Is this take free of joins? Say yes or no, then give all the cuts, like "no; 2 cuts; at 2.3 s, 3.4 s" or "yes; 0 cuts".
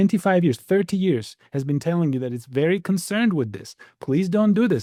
yes; 0 cuts